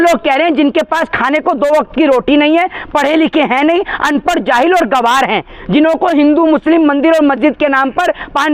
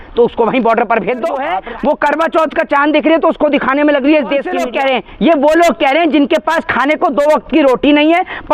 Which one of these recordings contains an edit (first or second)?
second